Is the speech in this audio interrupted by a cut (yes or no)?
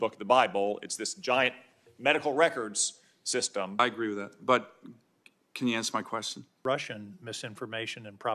yes